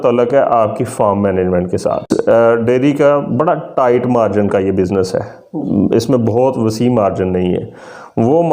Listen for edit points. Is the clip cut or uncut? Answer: cut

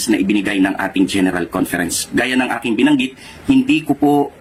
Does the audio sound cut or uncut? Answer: uncut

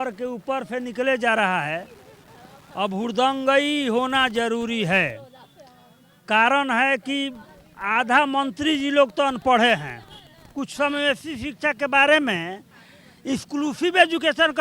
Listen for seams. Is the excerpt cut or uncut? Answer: uncut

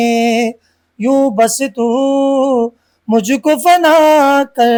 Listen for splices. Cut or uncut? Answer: uncut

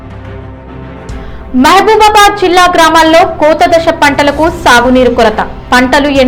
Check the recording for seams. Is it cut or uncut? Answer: uncut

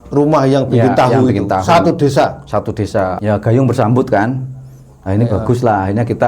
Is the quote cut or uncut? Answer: cut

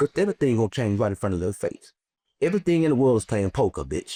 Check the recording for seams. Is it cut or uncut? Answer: uncut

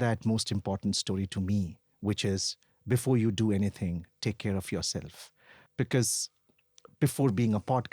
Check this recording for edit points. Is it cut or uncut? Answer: cut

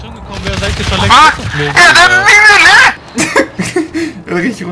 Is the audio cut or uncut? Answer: cut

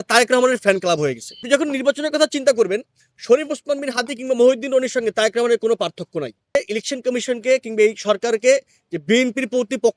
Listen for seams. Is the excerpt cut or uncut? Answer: cut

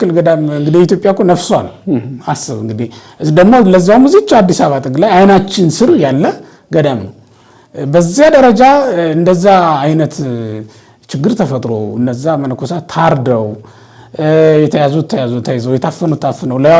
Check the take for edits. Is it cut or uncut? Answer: uncut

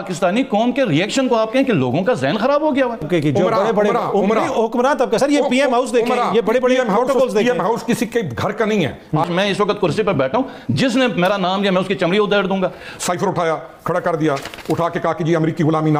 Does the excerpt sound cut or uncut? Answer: cut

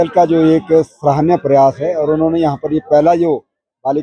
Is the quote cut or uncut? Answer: uncut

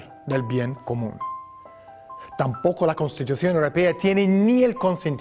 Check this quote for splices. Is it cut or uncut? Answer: cut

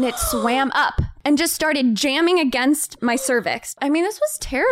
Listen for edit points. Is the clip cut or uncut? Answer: cut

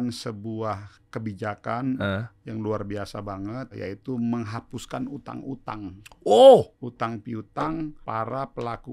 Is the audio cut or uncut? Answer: cut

